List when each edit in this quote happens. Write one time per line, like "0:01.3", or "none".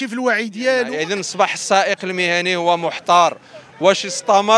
0:01.0